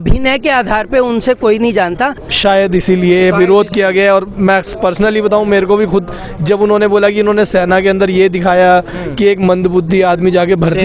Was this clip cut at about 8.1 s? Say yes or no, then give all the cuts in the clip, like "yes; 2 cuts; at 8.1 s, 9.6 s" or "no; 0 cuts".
no; 1 cut; at 2.2 s